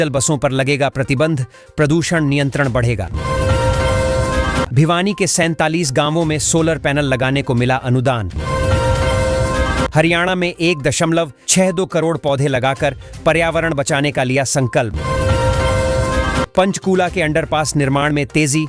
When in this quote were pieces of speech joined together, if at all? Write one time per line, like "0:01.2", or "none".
none